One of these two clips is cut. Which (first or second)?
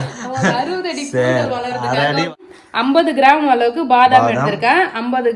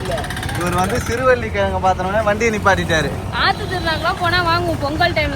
first